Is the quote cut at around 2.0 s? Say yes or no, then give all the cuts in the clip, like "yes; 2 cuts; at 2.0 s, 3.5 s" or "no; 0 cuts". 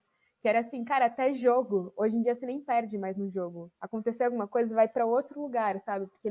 no; 0 cuts